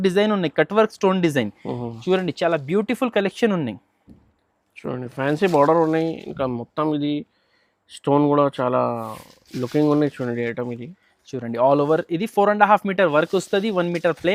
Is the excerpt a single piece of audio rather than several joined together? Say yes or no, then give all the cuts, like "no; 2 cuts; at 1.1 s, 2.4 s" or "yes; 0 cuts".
yes; 0 cuts